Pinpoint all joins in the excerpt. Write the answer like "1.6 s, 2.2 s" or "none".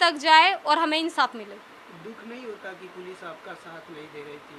none